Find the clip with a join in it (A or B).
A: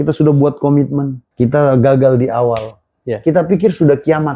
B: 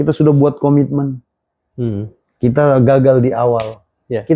A